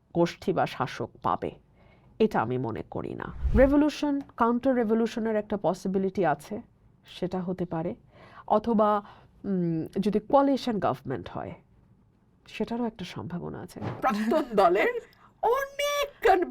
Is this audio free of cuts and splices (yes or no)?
no